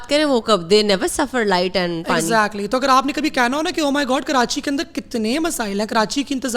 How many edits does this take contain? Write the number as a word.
zero